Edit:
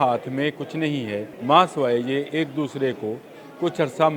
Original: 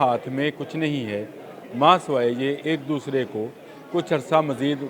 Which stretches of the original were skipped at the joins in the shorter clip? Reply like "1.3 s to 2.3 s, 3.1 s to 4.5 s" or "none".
1.3 s to 1.6 s